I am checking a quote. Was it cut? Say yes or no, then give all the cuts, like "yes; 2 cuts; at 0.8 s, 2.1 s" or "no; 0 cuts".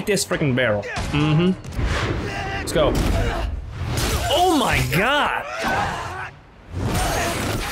yes; 1 cut; at 1.7 s